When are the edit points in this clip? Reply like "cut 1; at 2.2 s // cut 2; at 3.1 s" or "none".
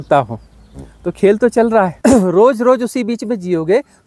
cut 1; at 1.9 s